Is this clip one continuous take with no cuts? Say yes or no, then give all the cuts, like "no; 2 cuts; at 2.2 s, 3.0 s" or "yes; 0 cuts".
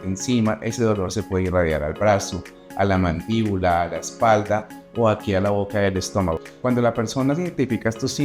no; 1 cut; at 6.4 s